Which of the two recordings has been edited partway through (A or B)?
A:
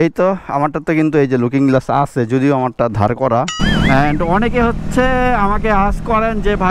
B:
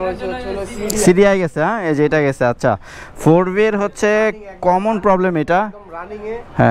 A